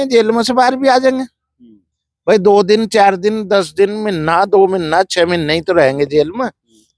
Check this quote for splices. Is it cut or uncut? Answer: uncut